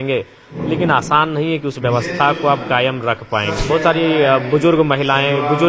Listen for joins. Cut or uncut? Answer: cut